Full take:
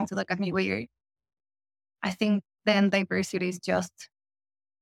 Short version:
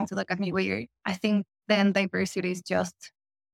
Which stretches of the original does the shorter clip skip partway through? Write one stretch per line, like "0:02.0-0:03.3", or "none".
0:00.9-0:01.9

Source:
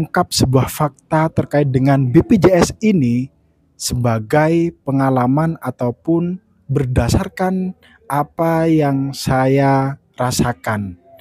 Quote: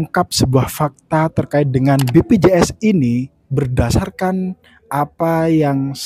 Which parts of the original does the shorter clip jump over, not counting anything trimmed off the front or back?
0:03.4-0:06.6

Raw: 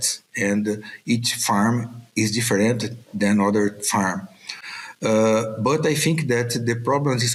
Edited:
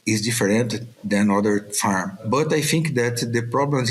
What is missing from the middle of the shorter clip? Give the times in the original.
0:04.3-0:05.5

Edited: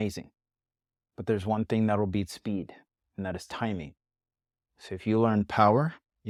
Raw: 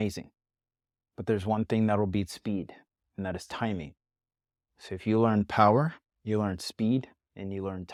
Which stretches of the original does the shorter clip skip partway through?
none

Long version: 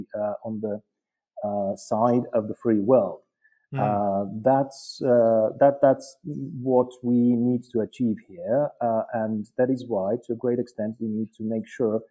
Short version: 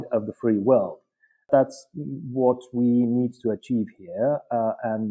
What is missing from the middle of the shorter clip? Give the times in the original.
0:03.7-0:05.8

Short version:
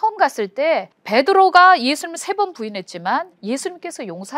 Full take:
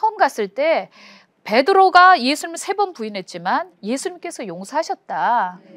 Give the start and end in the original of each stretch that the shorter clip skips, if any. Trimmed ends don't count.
0:00.9-0:01.3

